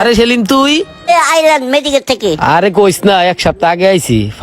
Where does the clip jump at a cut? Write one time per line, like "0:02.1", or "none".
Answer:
0:01.1